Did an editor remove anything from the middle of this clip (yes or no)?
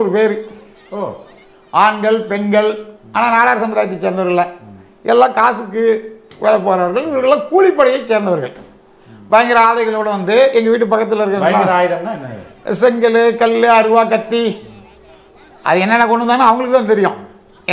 no